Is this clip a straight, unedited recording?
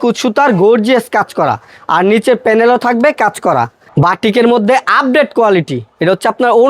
no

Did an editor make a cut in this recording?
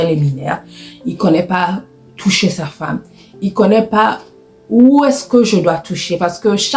no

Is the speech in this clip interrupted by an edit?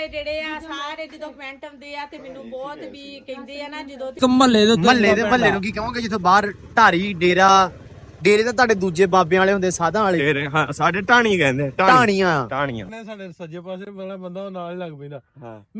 yes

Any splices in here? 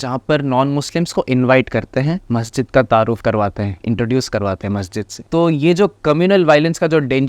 yes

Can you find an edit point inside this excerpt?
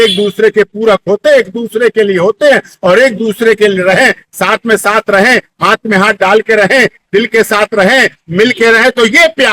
no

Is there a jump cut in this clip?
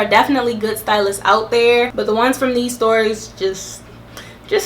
yes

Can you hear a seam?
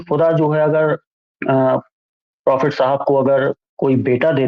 no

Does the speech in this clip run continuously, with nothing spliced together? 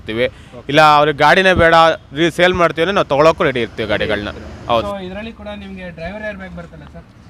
no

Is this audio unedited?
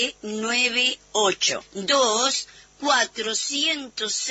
yes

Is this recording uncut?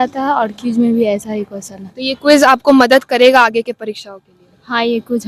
yes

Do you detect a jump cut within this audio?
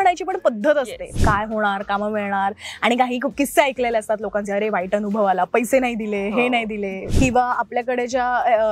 yes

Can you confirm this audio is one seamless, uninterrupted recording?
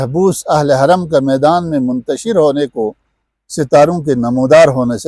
yes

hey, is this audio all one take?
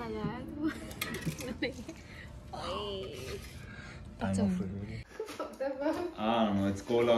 no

